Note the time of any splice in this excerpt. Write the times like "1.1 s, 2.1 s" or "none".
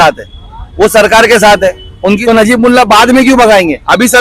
2.2 s